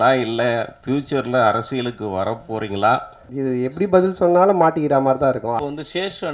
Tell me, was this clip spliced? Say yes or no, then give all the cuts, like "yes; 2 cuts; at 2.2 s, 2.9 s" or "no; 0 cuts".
yes; 2 cuts; at 3.2 s, 5.5 s